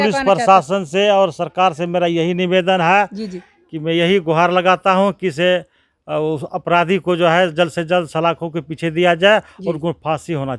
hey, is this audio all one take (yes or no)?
yes